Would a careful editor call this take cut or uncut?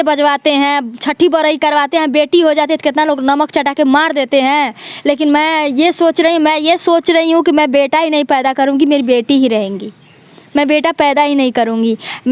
uncut